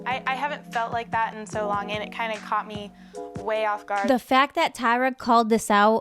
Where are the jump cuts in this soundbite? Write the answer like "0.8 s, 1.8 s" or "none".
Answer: 4.0 s